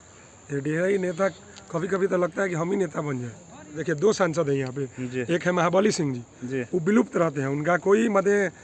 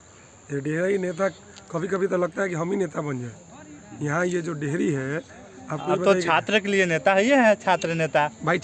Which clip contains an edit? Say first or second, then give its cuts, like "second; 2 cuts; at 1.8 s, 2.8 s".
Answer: first; 1 cut; at 3.8 s